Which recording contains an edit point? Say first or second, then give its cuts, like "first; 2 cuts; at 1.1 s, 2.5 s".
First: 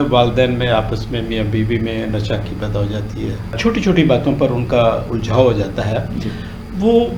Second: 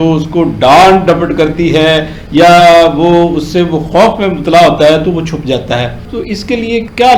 second; 1 cut; at 6.0 s